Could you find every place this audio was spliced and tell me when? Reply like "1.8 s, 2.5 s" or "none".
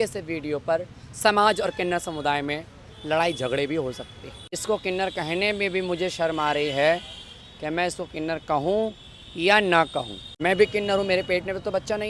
4.6 s, 10.2 s